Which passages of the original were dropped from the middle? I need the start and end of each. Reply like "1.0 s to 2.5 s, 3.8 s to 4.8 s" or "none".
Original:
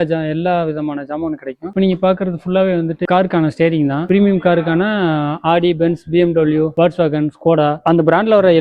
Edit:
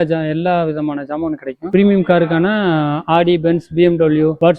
1.6 s to 4.0 s